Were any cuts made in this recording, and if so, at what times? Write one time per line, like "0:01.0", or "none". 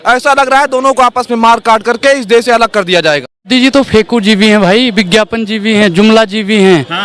0:03.5